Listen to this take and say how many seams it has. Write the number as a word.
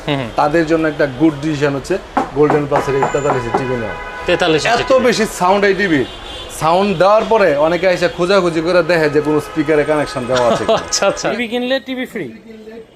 one